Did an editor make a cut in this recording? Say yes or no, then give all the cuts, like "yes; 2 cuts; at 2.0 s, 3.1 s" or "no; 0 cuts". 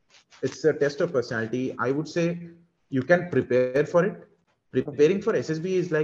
no; 0 cuts